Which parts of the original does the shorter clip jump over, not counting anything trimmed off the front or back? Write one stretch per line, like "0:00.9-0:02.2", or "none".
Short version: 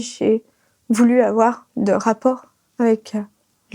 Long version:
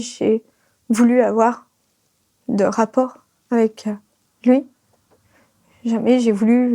0:01.7-0:02.4